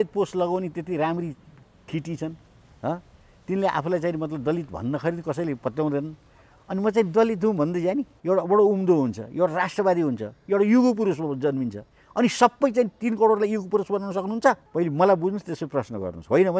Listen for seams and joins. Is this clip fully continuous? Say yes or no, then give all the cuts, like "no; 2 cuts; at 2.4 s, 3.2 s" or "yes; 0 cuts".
no; 2 cuts; at 8.1 s, 14.6 s